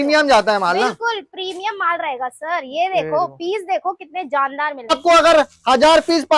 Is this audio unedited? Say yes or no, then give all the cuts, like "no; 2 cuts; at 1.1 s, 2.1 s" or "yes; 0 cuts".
no; 1 cut; at 4.9 s